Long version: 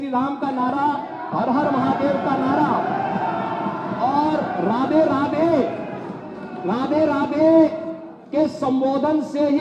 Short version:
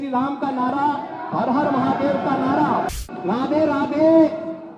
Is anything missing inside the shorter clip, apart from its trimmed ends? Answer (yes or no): yes